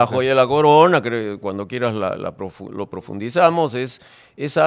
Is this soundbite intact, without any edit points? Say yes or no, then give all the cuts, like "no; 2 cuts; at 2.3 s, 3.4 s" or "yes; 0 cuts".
yes; 0 cuts